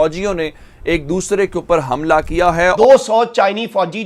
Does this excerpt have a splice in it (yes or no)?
yes